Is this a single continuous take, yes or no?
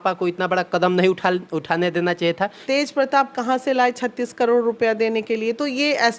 no